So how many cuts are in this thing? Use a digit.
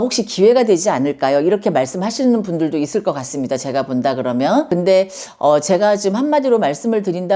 0